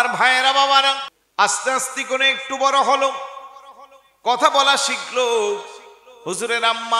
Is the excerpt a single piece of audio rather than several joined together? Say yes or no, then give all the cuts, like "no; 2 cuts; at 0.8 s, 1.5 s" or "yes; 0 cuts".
no; 1 cut; at 1.1 s